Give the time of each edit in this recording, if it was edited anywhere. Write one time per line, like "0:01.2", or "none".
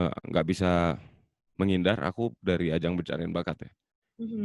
none